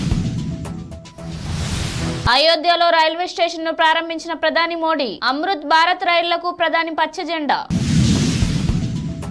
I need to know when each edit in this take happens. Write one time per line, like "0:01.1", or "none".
0:02.2